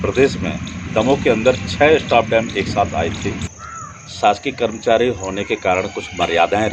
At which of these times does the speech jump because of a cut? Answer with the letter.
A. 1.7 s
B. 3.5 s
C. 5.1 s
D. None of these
B